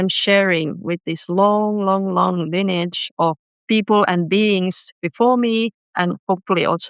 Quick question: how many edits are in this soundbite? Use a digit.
1